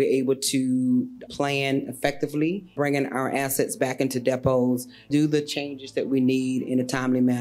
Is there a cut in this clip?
yes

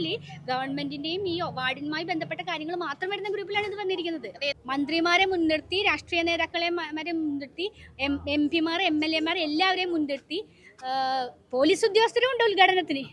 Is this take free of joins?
no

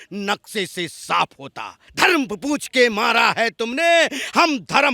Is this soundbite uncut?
no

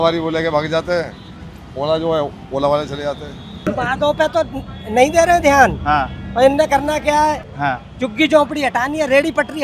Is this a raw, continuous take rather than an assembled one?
no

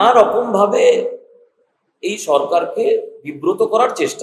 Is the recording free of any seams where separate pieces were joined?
yes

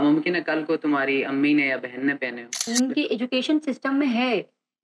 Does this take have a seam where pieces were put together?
yes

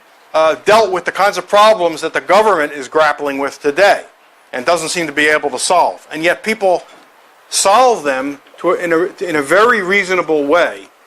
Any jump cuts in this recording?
yes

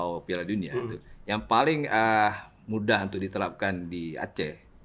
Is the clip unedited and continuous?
yes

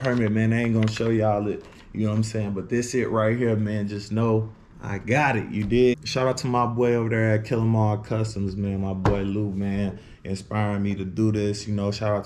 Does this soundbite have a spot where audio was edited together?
yes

